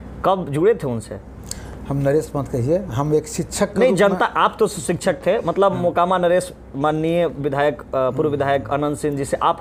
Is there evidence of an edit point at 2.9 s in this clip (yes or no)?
no